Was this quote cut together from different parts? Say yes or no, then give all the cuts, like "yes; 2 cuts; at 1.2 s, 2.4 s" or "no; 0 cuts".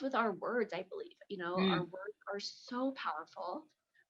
no; 0 cuts